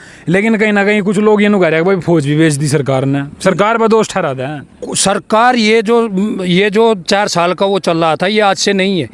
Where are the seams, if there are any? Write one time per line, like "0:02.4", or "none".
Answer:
none